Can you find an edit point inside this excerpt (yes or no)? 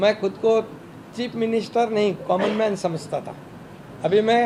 no